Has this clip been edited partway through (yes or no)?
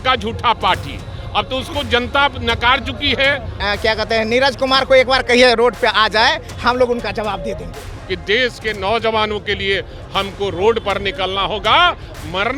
yes